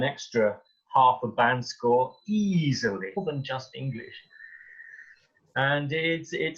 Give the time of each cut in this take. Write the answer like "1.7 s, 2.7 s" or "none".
3.2 s